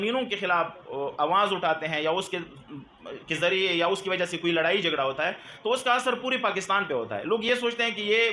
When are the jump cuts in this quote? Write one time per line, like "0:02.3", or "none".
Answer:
none